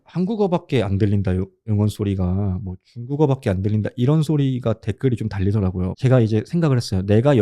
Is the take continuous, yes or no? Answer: no